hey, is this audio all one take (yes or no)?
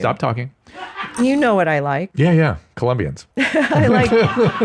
no